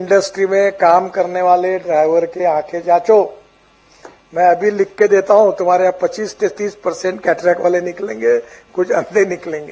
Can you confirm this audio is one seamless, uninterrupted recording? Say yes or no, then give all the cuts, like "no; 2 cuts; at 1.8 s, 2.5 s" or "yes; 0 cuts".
yes; 0 cuts